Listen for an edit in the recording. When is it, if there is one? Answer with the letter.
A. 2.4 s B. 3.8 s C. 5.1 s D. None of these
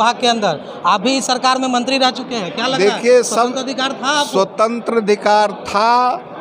D